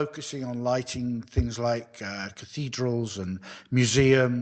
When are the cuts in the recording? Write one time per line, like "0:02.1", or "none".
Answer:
0:01.5